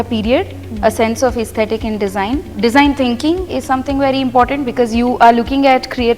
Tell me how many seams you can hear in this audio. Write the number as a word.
one